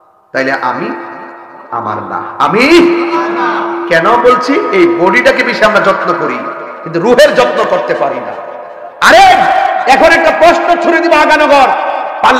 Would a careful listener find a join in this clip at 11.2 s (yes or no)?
no